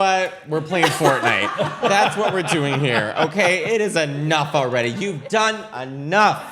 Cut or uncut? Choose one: uncut